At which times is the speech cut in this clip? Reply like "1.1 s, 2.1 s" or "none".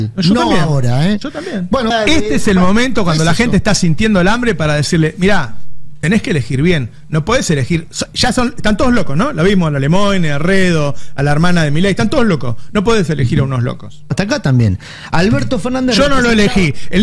1.9 s, 14.1 s